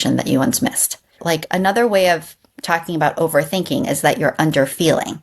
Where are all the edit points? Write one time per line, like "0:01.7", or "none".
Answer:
0:01.1